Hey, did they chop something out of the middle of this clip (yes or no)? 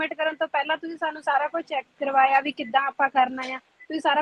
no